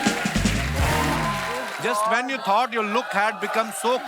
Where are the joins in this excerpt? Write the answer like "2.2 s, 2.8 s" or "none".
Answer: 1.7 s